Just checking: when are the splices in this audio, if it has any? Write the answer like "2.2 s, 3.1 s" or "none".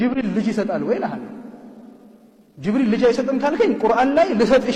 none